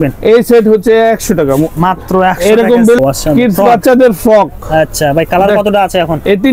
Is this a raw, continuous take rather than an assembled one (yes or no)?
no